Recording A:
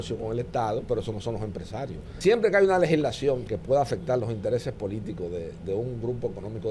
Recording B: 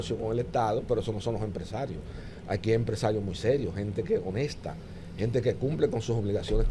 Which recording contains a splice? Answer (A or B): A